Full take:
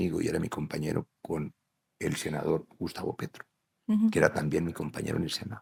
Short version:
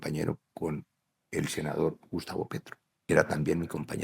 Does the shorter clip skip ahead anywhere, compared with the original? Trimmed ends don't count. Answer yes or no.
yes